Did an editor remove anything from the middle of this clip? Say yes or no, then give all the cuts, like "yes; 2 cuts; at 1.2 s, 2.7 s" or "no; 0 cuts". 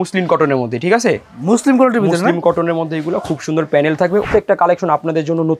yes; 1 cut; at 4.3 s